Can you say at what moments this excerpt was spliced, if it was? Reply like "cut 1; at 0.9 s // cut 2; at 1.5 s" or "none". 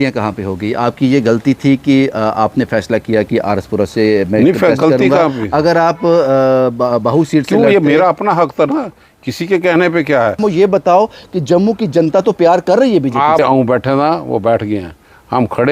cut 1; at 10.4 s // cut 2; at 13.4 s